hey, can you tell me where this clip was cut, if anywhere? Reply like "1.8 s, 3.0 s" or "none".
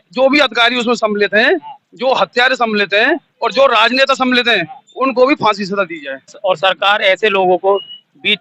6.3 s